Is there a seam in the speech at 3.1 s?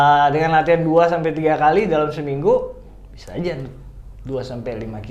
no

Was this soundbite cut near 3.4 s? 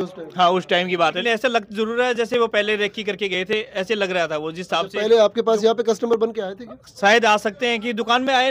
no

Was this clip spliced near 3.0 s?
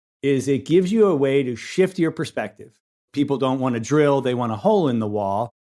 yes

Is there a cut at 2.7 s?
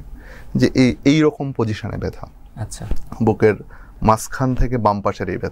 no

